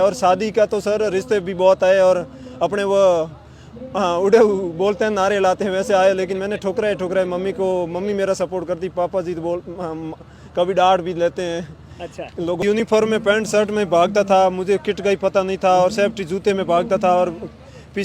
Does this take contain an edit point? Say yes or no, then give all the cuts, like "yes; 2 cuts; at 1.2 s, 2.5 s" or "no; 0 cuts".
yes; 1 cut; at 12.8 s